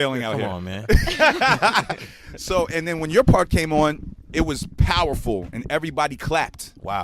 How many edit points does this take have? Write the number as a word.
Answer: one